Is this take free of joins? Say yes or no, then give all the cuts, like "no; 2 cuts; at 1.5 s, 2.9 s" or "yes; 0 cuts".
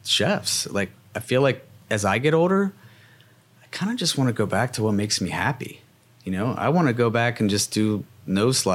yes; 0 cuts